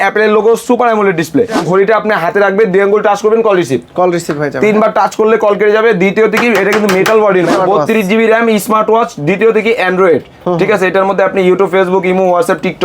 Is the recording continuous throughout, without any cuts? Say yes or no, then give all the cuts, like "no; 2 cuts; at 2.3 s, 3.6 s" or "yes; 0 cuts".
no; 2 cuts; at 1.6 s, 7.6 s